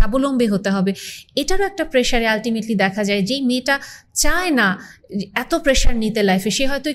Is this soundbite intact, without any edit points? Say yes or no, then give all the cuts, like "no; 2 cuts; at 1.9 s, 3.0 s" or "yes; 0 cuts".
yes; 0 cuts